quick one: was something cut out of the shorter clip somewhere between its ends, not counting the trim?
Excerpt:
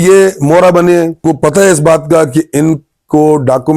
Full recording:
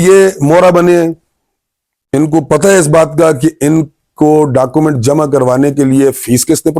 yes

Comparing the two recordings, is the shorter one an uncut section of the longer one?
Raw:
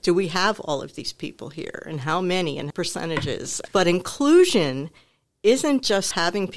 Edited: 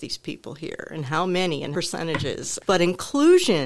no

